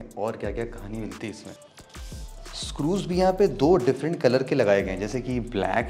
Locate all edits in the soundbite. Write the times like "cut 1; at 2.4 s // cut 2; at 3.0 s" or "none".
none